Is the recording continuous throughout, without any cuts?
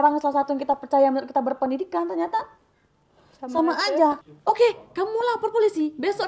no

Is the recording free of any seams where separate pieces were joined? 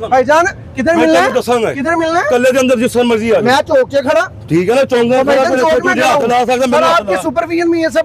yes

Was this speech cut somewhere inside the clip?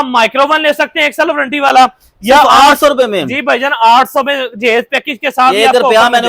no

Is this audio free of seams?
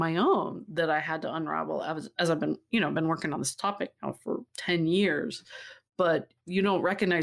no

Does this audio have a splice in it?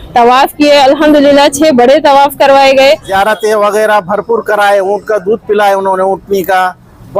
yes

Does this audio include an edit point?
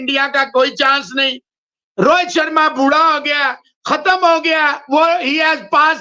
no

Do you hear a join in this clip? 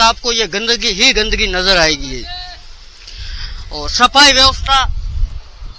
no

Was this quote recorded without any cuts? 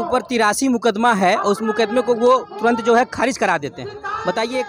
yes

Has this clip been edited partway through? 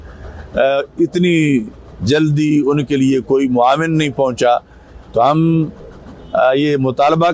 no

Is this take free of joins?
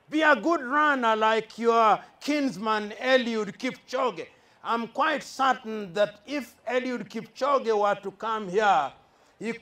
yes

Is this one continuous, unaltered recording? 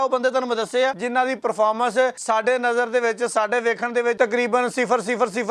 no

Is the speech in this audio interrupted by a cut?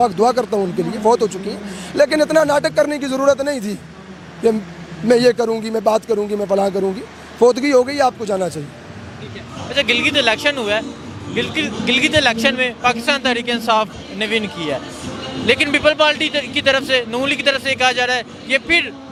no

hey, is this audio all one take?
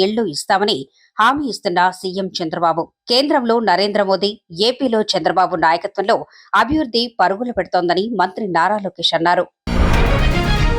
no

